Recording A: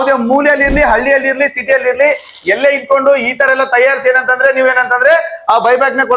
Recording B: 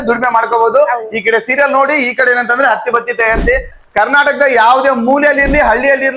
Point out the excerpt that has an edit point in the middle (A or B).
B